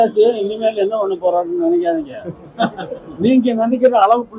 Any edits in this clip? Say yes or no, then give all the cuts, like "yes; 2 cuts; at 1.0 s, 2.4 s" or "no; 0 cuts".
no; 0 cuts